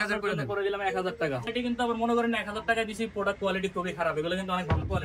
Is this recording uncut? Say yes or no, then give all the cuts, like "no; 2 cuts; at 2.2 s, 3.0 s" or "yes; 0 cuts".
no; 1 cut; at 1.5 s